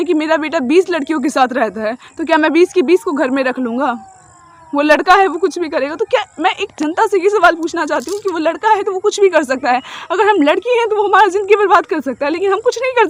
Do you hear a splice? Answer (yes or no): no